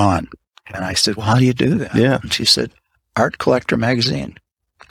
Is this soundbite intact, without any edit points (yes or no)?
yes